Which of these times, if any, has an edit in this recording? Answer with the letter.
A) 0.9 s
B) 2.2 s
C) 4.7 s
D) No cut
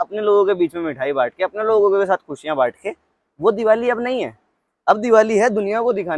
D